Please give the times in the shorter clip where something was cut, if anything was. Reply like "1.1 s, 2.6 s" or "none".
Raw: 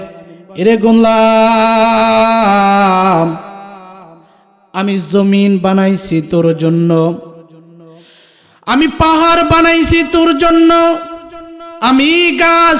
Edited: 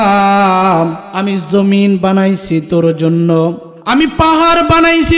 1.0 s, 3.7 s